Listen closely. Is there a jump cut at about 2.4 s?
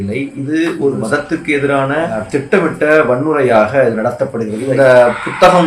no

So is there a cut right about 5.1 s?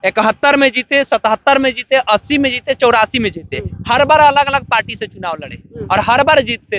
no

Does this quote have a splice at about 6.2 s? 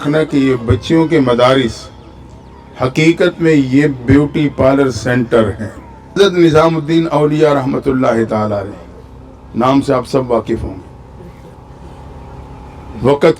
yes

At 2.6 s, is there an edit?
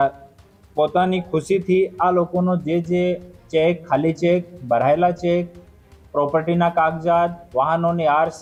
no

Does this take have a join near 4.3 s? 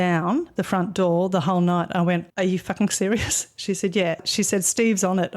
yes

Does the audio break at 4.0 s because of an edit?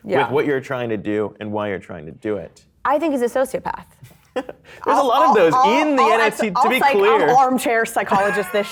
no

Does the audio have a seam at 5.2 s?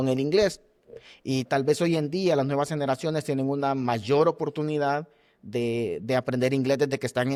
no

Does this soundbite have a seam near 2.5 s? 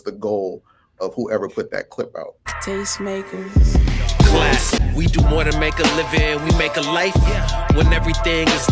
yes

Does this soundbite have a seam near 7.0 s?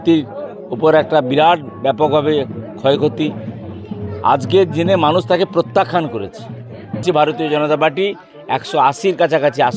yes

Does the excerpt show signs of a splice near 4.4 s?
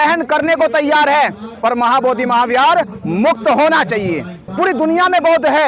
yes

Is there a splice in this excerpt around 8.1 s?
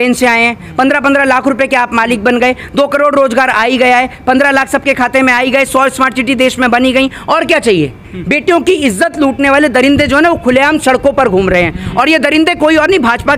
yes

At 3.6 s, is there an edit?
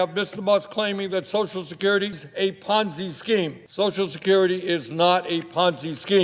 yes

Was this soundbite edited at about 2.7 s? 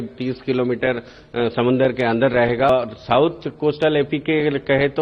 yes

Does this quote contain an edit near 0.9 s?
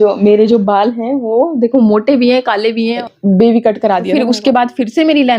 no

